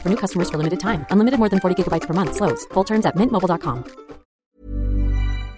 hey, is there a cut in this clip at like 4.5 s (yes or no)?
yes